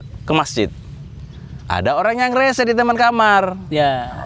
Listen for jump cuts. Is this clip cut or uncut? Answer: uncut